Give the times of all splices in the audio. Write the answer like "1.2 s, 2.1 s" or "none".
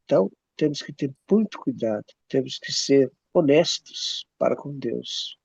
2.1 s, 3.2 s